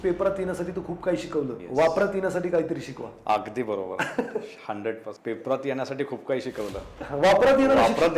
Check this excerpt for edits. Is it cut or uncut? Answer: cut